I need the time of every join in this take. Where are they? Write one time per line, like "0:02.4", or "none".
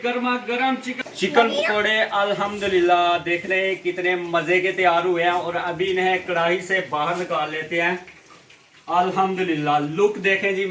0:00.9